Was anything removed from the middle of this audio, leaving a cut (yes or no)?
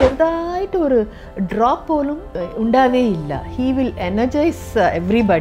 yes